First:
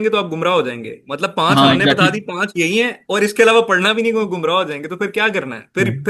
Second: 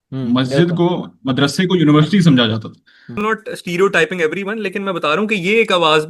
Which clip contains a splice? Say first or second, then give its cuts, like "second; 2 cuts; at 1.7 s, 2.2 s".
second; 1 cut; at 3.2 s